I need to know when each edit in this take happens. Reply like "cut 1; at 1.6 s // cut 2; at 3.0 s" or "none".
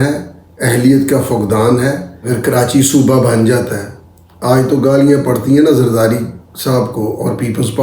cut 1; at 2.1 s